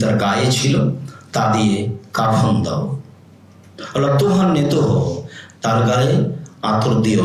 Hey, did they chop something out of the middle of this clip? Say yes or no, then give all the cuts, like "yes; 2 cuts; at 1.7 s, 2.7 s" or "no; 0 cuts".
no; 0 cuts